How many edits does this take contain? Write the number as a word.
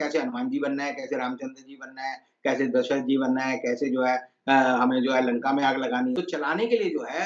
one